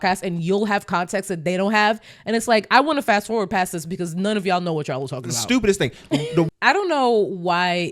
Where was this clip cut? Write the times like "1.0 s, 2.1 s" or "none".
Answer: 6.5 s